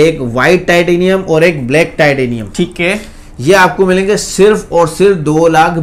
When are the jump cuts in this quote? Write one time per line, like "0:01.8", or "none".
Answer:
none